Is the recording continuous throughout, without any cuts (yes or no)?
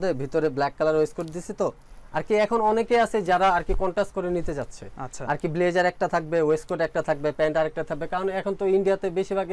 yes